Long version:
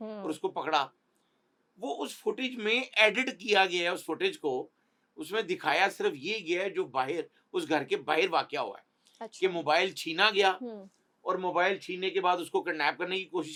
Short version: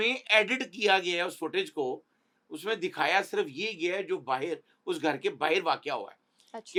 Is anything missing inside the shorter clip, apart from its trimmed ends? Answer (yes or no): no